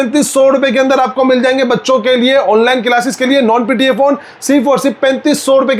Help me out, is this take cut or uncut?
uncut